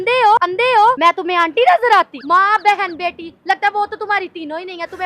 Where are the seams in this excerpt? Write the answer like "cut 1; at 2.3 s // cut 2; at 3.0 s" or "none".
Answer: cut 1; at 1.0 s // cut 2; at 2.2 s